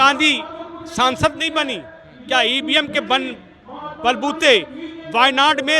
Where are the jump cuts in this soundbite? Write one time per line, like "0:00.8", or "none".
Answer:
none